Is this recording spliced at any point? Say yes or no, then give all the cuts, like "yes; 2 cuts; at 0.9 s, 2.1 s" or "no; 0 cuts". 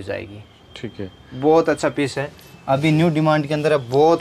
no; 0 cuts